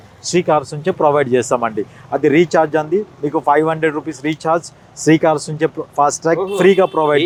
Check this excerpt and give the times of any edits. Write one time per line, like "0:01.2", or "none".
none